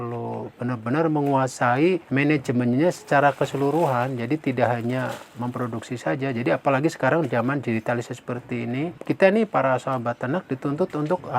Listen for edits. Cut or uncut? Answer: cut